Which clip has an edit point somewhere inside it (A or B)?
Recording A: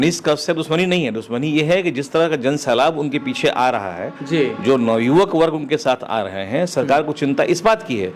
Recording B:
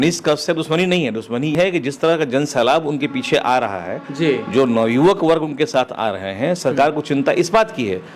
B